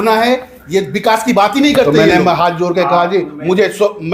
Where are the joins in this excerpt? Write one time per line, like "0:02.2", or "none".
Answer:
0:01.9

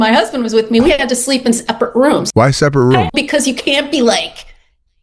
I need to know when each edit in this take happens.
0:02.2
0:03.1

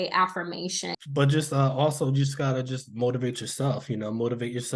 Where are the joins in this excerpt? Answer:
0:01.0

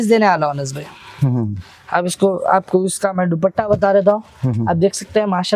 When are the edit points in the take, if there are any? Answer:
none

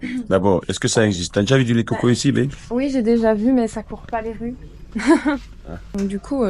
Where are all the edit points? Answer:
none

